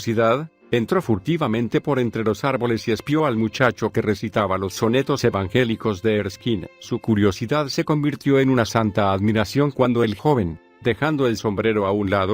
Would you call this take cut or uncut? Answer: cut